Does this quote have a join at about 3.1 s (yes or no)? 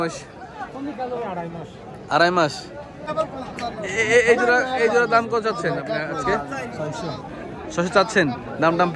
yes